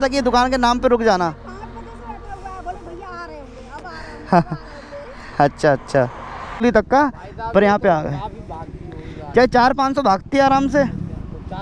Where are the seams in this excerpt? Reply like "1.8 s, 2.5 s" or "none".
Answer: 6.6 s

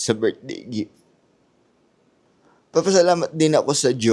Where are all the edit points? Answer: 2.2 s

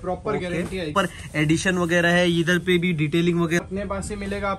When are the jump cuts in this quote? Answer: 0.9 s, 3.6 s

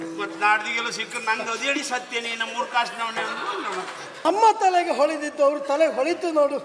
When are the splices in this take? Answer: 4.0 s

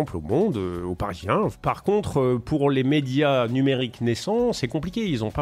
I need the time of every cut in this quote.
1.6 s

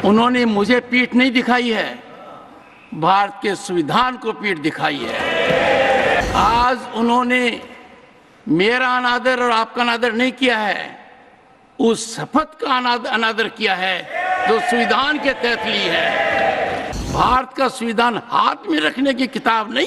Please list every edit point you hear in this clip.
6.2 s, 17.0 s

